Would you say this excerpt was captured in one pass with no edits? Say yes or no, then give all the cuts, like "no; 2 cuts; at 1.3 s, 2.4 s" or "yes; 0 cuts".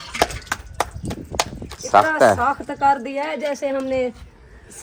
yes; 0 cuts